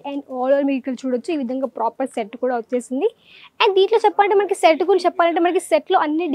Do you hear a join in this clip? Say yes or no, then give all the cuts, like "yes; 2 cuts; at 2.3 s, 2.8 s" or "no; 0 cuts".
no; 0 cuts